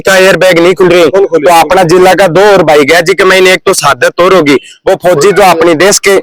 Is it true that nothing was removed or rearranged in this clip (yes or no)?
yes